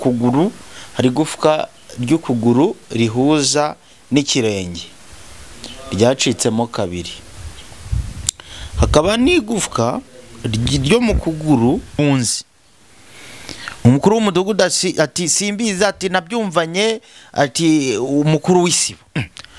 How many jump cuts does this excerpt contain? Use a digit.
1